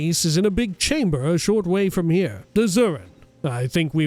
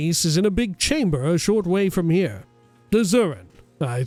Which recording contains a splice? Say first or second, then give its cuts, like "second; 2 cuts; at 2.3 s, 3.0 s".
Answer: first; 1 cut; at 2.4 s